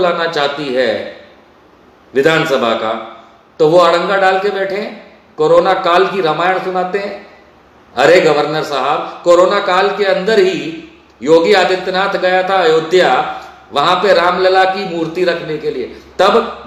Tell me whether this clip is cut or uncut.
uncut